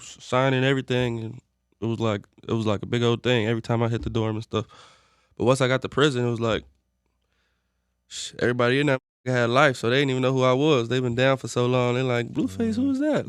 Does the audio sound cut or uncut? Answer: uncut